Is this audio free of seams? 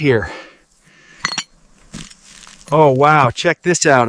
yes; 0 cuts

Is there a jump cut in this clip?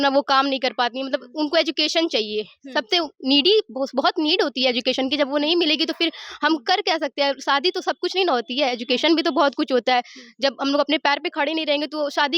no; 0 cuts

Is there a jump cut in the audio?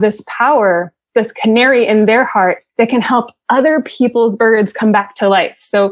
yes; 1 cut; at 2.6 s

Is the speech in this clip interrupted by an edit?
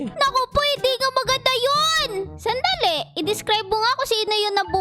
yes; 1 cut; at 2.3 s

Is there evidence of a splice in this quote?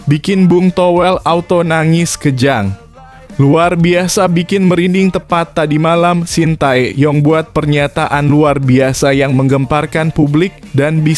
no; 0 cuts

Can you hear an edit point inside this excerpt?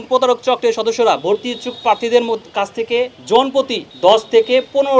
yes; 2 cuts; at 3.2 s, 3.8 s

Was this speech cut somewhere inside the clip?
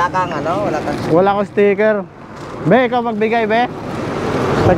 no; 0 cuts

